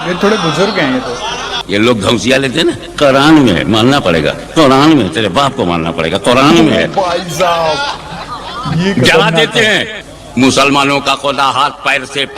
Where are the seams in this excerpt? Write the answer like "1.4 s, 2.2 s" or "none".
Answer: 1.5 s, 10.0 s